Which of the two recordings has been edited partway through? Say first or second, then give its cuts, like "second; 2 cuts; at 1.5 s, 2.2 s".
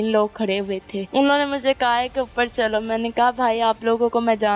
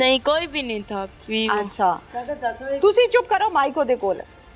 first; 1 cut; at 1.0 s